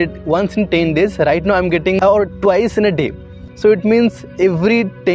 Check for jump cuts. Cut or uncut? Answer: uncut